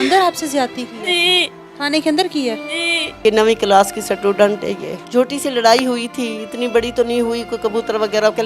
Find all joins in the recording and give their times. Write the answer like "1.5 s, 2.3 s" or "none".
3.2 s, 5.0 s